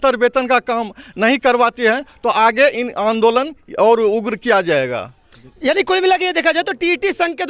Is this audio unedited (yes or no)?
yes